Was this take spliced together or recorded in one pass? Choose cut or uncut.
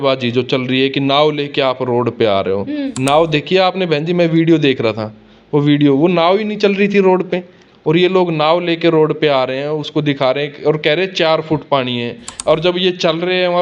uncut